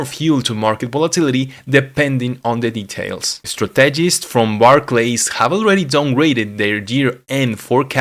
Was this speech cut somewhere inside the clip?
no; 0 cuts

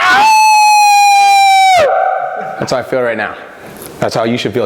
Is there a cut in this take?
no; 0 cuts

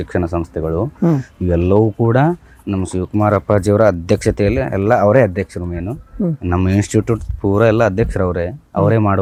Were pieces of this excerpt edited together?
no; 0 cuts

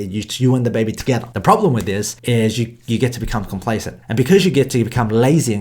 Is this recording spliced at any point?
yes; 3 cuts; at 1.3 s, 2.1 s, 4.0 s

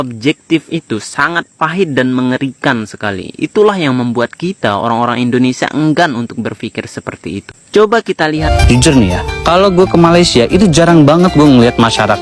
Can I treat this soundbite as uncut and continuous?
no; 1 cut; at 8.5 s

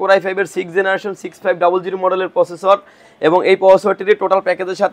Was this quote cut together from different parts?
no; 0 cuts

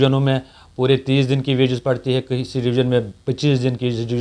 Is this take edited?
no; 0 cuts

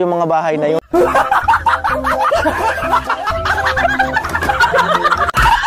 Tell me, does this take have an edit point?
no; 0 cuts

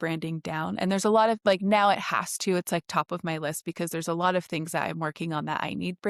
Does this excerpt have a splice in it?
no; 0 cuts

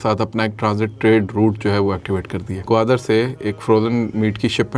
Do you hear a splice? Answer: yes; 1 cut; at 2.6 s

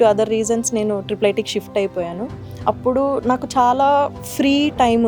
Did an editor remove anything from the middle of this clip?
no; 0 cuts

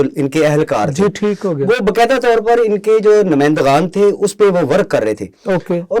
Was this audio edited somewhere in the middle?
no; 0 cuts

